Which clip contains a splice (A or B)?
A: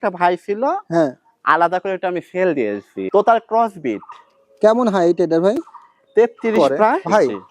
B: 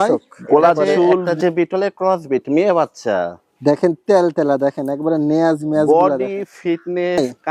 A